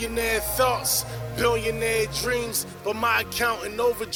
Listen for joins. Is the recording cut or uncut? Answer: uncut